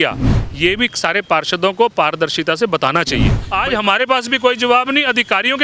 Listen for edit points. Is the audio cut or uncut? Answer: cut